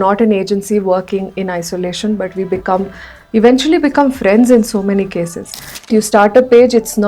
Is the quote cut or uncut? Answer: cut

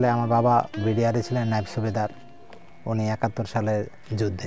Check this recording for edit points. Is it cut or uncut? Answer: uncut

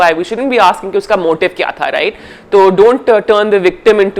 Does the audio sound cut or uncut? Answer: uncut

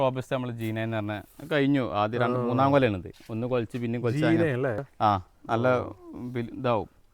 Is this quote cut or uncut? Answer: uncut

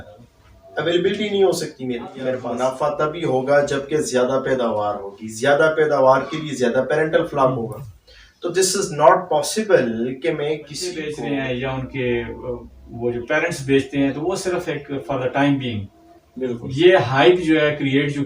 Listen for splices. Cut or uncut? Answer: cut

